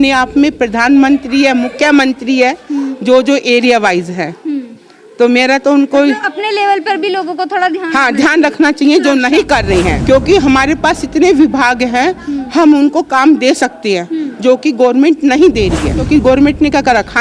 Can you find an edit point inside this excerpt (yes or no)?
yes